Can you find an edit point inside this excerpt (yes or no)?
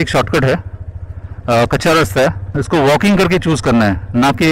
yes